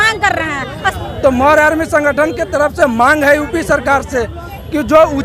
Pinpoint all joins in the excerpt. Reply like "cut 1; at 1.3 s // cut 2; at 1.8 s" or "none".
cut 1; at 0.9 s